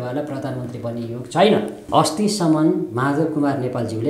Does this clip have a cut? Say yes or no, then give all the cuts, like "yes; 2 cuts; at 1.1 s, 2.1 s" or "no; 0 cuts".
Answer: yes; 1 cut; at 1.8 s